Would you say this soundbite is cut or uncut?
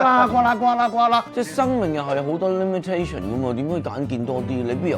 cut